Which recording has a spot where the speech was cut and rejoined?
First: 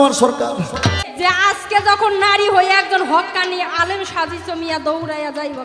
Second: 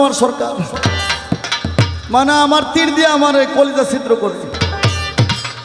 first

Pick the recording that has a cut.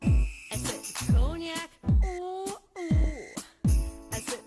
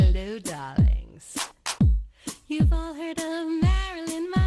second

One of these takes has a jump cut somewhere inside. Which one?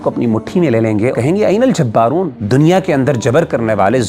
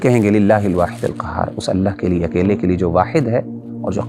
first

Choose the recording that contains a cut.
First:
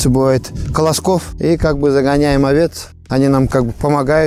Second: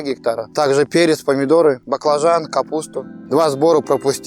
second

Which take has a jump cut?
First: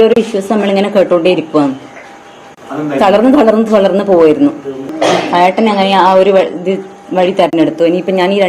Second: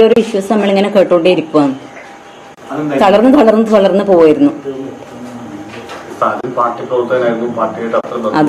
first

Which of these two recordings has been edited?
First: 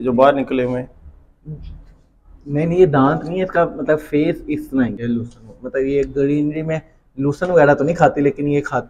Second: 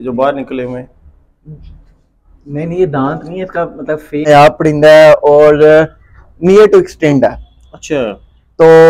second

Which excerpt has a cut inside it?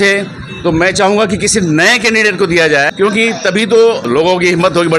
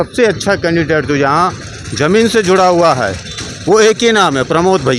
first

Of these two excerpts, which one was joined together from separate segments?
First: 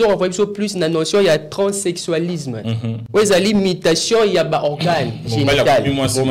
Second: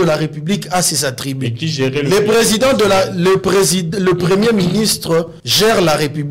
second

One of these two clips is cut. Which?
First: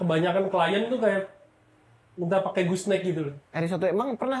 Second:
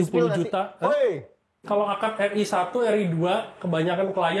second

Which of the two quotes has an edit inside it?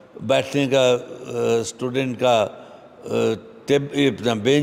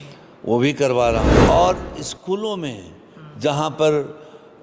second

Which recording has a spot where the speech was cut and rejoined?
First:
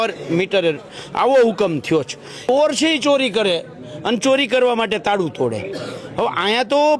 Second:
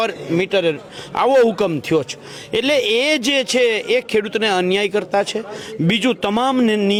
first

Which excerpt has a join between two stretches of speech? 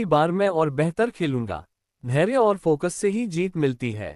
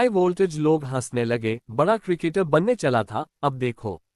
first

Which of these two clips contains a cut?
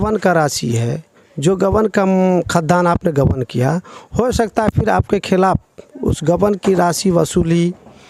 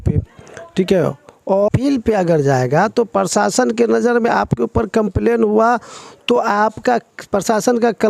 second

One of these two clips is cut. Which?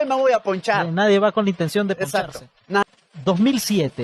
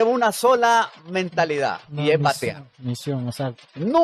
first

